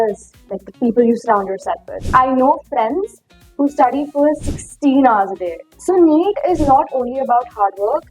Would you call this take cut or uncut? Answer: cut